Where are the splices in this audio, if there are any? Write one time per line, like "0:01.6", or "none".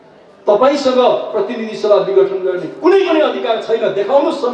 none